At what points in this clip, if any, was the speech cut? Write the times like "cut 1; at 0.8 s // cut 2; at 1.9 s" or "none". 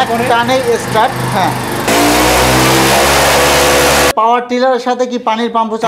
cut 1; at 1.9 s // cut 2; at 4.1 s

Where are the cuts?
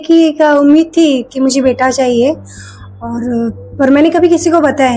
none

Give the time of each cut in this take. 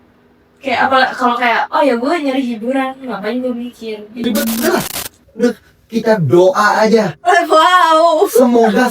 cut 1; at 4.4 s

